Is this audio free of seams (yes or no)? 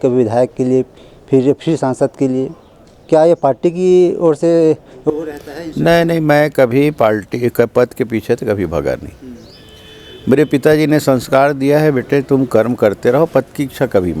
yes